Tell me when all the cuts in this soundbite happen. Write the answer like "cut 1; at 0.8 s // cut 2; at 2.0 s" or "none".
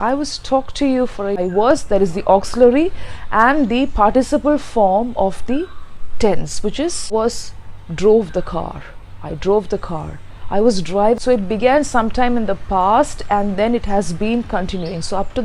cut 1; at 1.4 s // cut 2; at 7.1 s // cut 3; at 11.2 s